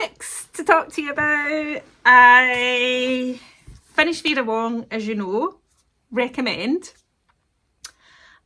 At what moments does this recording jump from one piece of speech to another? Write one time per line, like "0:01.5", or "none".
none